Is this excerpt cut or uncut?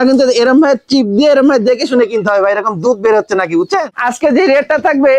cut